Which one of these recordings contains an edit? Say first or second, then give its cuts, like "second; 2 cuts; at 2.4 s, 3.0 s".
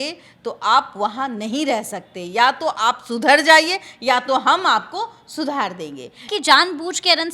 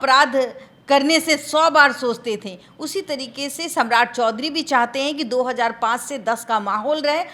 first; 1 cut; at 6.3 s